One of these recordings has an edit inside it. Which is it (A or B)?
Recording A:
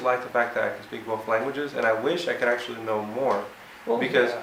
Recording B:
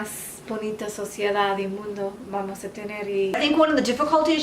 B